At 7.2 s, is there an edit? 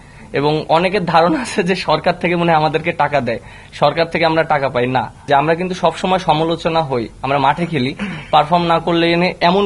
no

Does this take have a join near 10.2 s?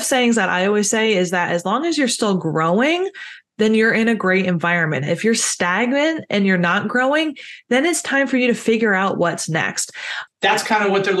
yes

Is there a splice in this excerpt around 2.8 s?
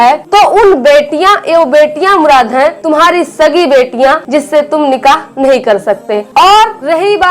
yes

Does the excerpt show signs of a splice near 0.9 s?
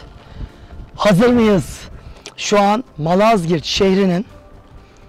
no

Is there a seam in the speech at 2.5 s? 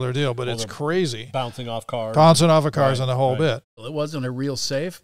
no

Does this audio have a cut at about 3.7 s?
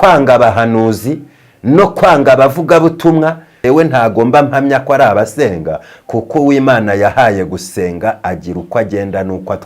yes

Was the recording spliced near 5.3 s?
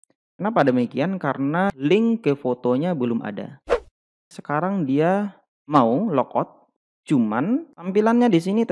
no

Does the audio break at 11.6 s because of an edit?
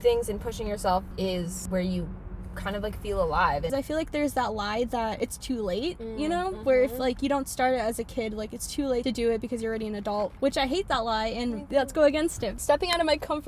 yes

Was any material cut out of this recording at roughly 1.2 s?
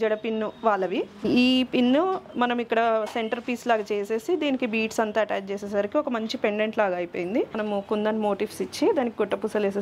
yes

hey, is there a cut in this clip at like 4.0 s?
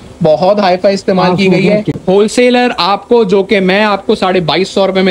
no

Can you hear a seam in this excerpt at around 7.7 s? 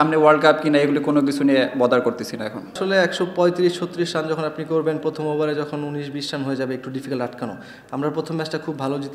yes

